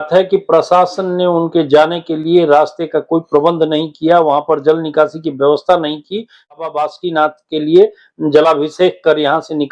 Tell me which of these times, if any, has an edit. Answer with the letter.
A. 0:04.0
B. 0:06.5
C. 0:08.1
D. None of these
B